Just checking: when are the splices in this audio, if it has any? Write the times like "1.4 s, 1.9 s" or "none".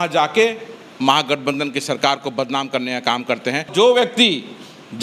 3.7 s